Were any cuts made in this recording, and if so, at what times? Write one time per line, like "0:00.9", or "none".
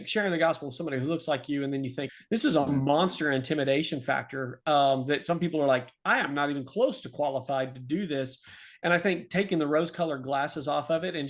0:02.0